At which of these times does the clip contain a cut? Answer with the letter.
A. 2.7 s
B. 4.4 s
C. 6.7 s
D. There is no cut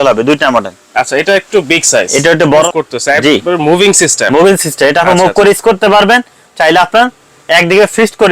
A